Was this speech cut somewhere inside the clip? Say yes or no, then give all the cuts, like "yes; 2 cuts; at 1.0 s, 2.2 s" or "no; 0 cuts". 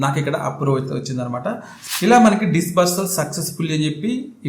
yes; 1 cut; at 1.7 s